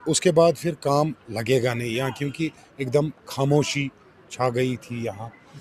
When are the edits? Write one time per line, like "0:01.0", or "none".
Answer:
none